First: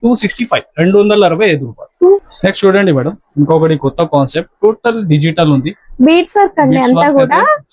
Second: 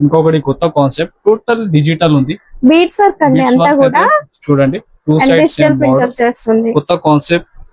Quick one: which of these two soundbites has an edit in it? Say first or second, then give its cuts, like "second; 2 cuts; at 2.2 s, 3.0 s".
first; 1 cut; at 2.2 s